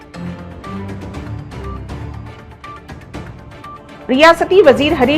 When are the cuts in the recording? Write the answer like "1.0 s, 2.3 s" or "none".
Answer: 3.5 s